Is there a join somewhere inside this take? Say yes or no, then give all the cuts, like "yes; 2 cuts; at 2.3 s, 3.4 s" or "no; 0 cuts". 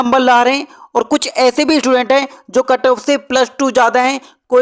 no; 0 cuts